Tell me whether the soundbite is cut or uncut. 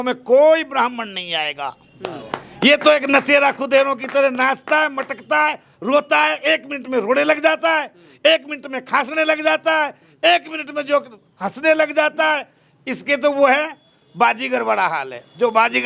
uncut